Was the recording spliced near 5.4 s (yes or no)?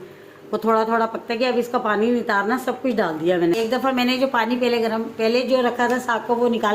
no